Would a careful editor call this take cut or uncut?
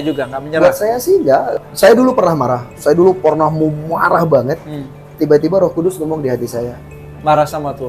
cut